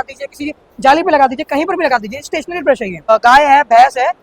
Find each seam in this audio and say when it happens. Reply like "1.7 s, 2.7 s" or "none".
3.1 s